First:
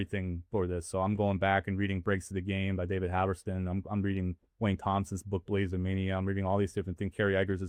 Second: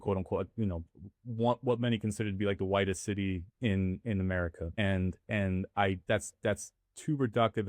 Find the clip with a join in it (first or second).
second